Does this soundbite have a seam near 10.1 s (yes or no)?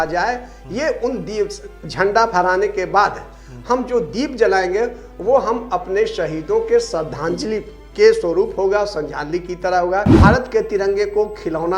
yes